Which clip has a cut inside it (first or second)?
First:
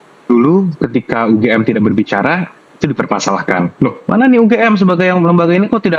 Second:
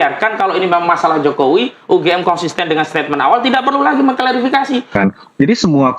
second